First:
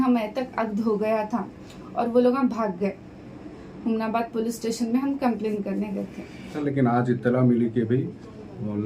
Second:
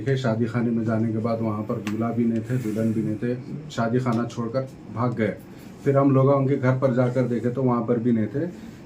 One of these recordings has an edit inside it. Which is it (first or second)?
first